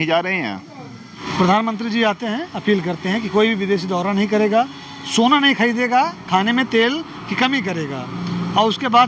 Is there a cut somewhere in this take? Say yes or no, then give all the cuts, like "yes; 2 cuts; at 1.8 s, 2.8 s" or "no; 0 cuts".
yes; 1 cut; at 1.1 s